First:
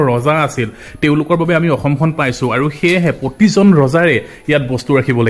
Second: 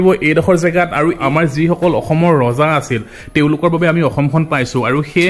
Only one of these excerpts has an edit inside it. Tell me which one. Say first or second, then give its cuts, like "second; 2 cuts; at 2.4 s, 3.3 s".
second; 1 cut; at 1.2 s